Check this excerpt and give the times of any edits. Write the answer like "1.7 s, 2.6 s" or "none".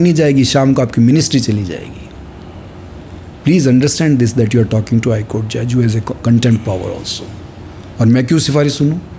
none